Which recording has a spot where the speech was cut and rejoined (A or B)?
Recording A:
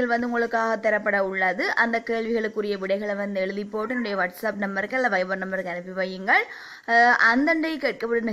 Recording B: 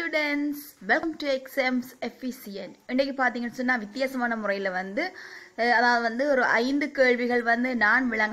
B